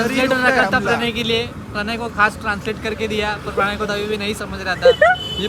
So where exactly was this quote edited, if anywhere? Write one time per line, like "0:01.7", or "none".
none

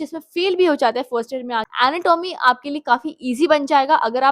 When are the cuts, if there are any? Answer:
0:01.7

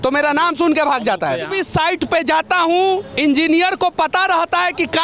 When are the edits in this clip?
0:01.5

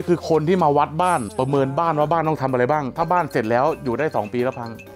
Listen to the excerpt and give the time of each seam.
0:01.3

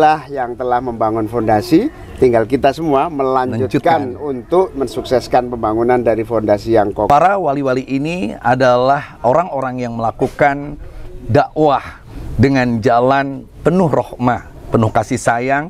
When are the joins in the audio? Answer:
0:07.1

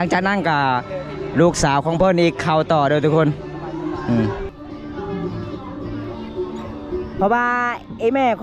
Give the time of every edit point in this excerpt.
0:04.5

